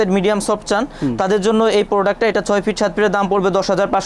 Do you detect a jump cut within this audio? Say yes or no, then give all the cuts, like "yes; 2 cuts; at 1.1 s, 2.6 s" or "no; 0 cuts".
no; 0 cuts